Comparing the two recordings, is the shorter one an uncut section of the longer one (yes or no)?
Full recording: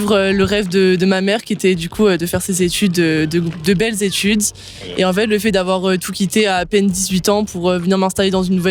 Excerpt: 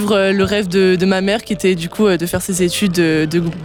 yes